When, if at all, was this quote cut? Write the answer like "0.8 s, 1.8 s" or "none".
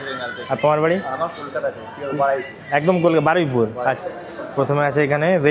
4.0 s